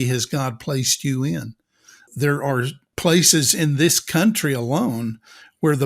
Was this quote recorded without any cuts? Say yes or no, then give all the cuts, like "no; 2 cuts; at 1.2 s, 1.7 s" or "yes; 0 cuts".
no; 2 cuts; at 2.0 s, 2.8 s